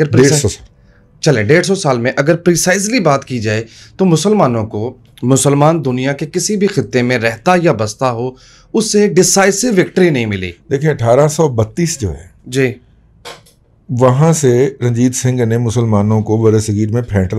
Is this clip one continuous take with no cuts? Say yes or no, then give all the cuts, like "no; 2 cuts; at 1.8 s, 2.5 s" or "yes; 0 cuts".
yes; 0 cuts